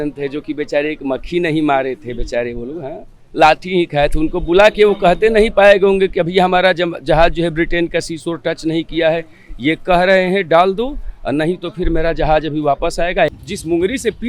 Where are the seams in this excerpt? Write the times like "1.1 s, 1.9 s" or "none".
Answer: 13.3 s